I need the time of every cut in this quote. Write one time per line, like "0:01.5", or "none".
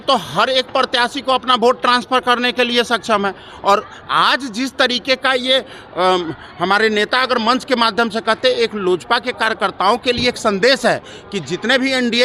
none